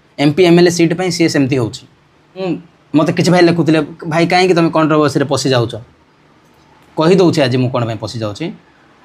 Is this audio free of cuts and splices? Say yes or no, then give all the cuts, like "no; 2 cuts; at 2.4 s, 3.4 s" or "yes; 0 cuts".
no; 1 cut; at 2.5 s